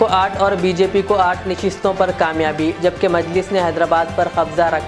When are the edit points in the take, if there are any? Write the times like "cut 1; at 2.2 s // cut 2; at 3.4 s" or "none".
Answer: none